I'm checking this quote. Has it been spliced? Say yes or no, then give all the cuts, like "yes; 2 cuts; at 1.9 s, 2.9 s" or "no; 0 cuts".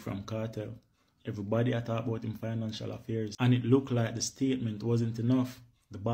yes; 1 cut; at 3.3 s